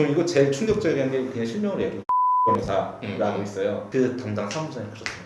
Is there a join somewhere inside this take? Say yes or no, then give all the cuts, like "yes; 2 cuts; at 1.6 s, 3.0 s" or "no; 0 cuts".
yes; 1 cut; at 3.8 s